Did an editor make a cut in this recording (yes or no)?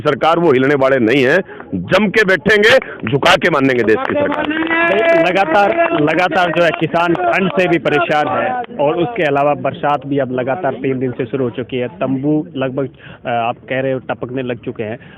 no